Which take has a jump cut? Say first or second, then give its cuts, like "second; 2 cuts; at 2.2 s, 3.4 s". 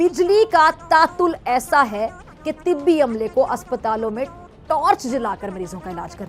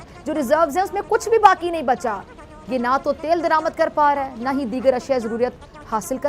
second; 1 cut; at 2.5 s